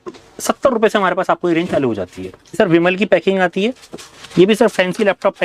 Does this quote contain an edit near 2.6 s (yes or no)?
yes